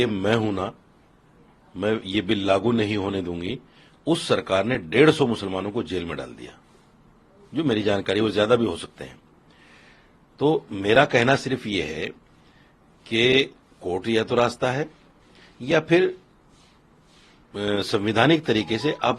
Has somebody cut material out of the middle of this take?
no; 0 cuts

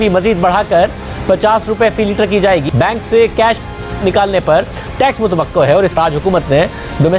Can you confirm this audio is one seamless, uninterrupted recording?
no; 2 cuts; at 2.7 s, 6.0 s

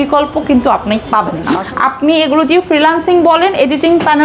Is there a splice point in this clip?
yes; 1 cut; at 1.6 s

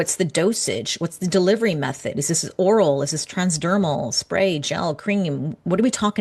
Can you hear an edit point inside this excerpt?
no; 0 cuts

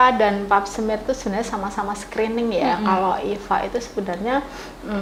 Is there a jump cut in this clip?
no; 0 cuts

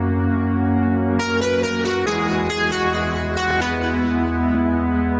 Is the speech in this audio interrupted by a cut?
no; 0 cuts

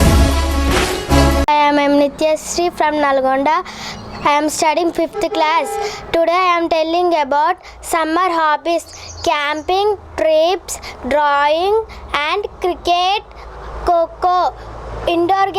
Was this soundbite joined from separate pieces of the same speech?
yes; 1 cut; at 1.4 s

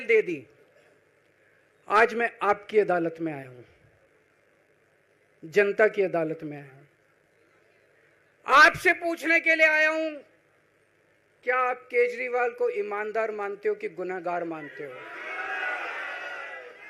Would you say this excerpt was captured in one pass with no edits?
yes; 0 cuts

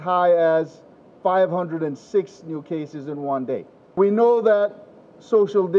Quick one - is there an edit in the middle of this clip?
yes; 1 cut; at 4.0 s

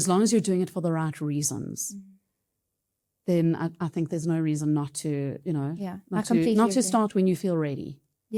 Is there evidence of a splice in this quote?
no; 0 cuts

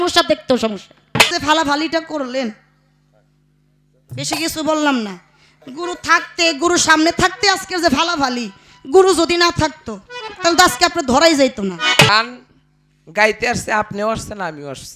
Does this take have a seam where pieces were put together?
yes; 2 cuts; at 1.3 s, 12.1 s

